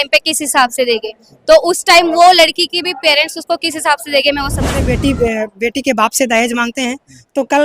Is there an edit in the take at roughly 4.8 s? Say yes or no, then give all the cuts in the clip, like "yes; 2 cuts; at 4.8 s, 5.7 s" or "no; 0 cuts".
yes; 1 cut; at 4.8 s